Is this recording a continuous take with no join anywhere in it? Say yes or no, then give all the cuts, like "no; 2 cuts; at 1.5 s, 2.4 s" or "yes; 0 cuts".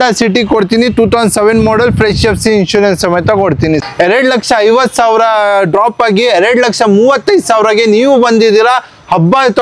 no; 1 cut; at 3.8 s